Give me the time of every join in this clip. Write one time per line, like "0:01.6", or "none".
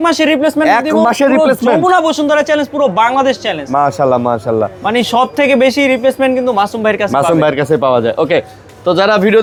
none